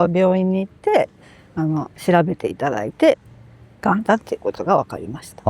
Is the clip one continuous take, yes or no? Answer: yes